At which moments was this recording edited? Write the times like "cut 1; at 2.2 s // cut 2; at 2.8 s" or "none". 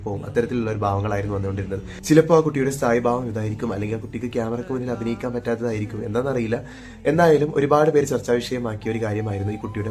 none